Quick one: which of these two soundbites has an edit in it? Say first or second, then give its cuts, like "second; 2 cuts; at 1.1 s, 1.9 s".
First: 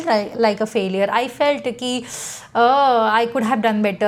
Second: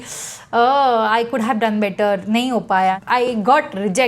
second; 1 cut; at 3.0 s